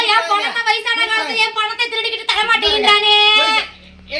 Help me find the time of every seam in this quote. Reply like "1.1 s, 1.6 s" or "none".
none